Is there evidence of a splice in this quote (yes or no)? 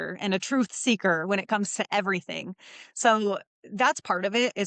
no